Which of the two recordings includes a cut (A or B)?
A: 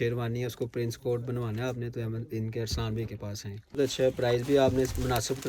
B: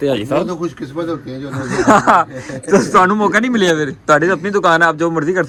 A